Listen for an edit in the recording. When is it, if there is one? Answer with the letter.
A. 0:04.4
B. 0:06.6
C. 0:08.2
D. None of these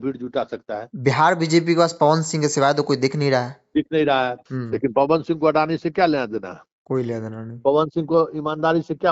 A